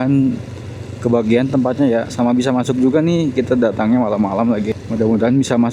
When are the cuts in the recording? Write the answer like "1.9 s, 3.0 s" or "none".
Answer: 4.8 s